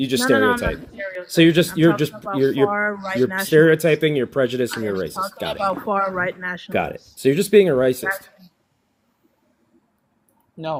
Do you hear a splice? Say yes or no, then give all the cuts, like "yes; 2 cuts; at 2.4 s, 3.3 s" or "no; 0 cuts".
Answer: no; 0 cuts